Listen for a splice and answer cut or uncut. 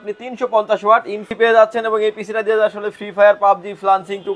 cut